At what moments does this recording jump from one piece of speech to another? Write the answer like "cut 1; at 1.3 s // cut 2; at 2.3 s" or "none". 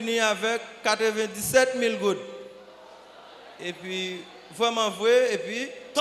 none